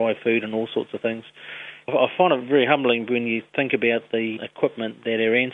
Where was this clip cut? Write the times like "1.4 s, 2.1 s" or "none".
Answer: 1.9 s, 3.5 s, 4.3 s